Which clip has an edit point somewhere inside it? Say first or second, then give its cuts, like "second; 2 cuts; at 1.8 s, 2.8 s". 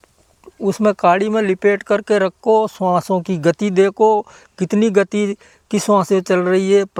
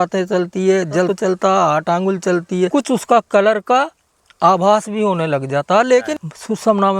second; 3 cuts; at 1.1 s, 2.7 s, 6.1 s